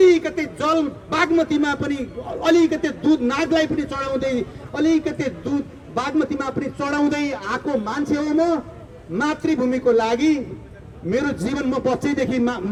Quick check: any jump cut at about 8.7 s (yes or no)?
no